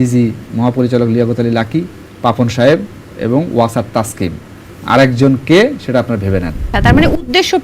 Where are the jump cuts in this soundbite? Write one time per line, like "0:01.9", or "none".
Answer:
0:02.0
0:06.7